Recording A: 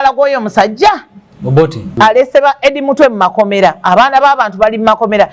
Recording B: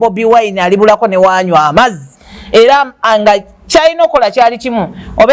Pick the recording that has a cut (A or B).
A